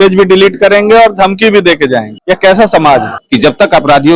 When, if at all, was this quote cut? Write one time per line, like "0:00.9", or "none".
0:02.1
0:03.2

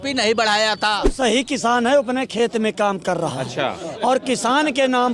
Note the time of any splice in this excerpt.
0:01.1

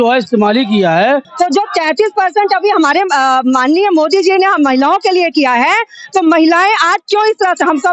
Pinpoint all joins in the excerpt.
0:01.3

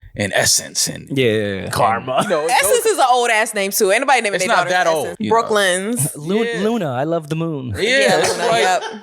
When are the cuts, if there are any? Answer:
0:05.1

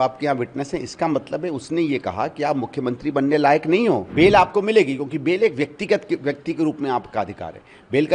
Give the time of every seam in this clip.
0:04.1

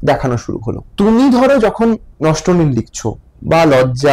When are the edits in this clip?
0:00.9

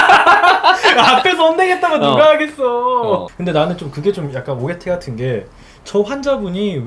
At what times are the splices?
none

